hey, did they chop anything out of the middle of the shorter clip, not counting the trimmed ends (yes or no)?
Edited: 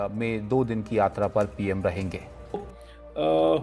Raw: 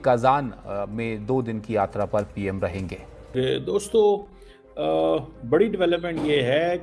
yes